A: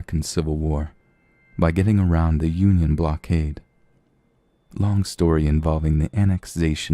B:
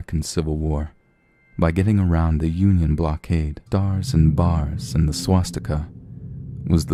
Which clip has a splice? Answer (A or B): A